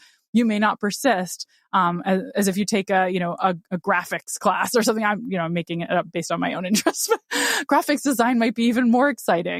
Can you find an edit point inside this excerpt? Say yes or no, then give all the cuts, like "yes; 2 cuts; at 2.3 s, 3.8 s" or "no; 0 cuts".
no; 0 cuts